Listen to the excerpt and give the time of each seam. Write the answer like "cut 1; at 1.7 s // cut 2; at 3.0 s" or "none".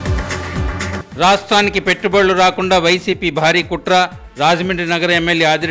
cut 1; at 1.0 s